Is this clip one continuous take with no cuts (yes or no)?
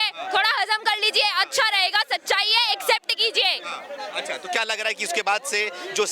yes